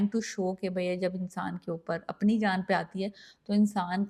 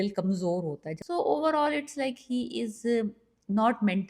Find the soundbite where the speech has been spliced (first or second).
second